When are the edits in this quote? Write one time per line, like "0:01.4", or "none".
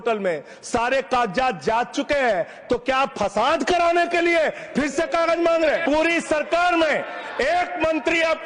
0:05.8